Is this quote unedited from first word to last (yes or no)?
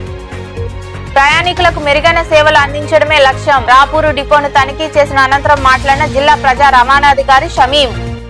yes